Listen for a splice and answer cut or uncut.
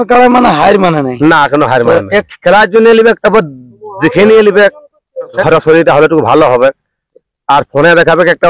cut